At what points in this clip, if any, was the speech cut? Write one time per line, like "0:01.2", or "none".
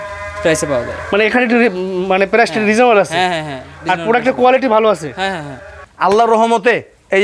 0:05.7